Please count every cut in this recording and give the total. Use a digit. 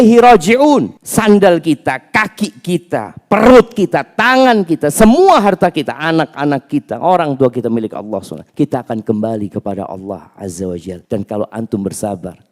3